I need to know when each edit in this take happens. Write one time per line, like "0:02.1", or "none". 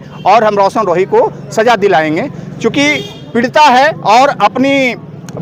none